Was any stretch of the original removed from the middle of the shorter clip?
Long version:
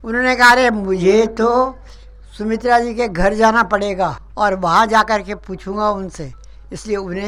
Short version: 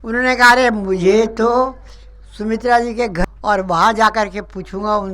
yes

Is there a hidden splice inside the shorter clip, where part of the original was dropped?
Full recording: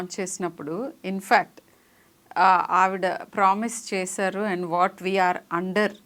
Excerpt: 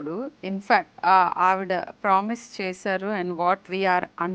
yes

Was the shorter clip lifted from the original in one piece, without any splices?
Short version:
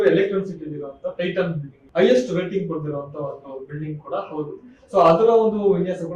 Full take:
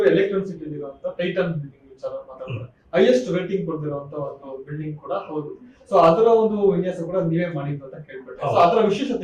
no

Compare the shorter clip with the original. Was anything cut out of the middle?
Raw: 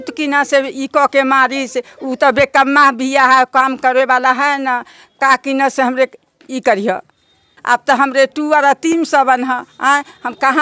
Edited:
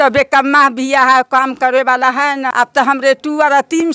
yes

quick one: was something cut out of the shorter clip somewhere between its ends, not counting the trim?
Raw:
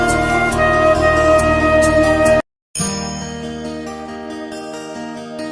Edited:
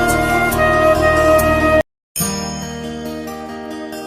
yes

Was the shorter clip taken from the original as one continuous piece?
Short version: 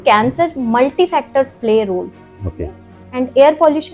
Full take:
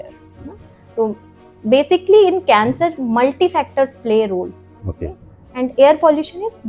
yes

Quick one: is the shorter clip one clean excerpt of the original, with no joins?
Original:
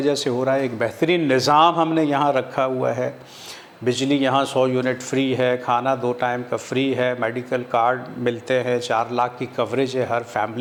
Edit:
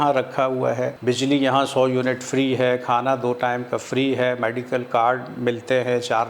no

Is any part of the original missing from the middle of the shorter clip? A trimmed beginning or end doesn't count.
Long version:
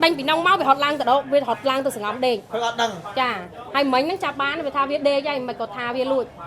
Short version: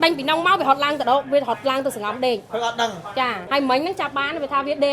yes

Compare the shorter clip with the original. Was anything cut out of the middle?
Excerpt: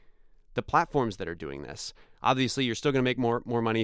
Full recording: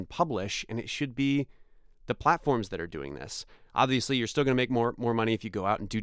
no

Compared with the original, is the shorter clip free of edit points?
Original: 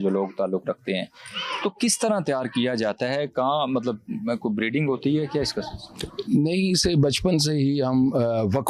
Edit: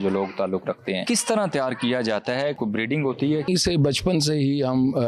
no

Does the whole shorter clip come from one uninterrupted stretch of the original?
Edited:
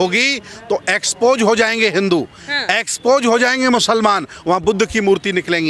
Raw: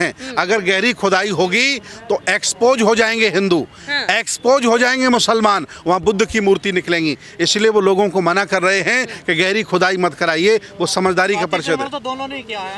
yes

